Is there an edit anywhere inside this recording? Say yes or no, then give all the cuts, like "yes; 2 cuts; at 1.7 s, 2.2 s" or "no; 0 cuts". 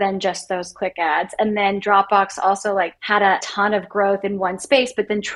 no; 0 cuts